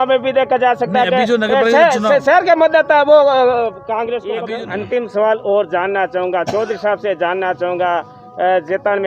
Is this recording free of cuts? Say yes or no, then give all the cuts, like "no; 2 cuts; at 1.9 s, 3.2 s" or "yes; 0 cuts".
no; 1 cut; at 4.4 s